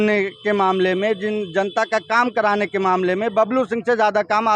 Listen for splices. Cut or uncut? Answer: uncut